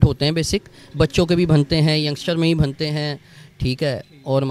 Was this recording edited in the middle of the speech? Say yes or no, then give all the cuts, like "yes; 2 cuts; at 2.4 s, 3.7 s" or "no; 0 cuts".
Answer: no; 0 cuts